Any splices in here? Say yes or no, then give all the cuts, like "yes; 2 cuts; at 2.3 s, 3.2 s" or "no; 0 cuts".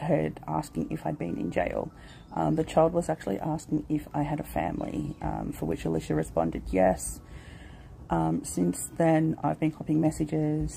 no; 0 cuts